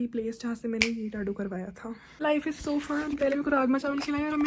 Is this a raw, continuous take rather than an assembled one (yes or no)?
no